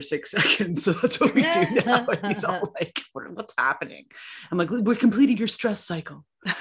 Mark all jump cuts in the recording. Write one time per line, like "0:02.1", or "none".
none